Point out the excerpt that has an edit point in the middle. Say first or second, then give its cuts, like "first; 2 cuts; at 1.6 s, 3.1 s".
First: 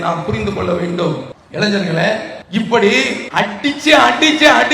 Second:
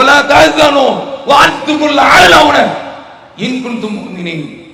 first; 3 cuts; at 1.4 s, 2.3 s, 3.2 s